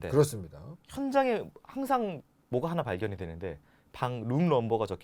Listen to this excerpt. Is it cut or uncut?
uncut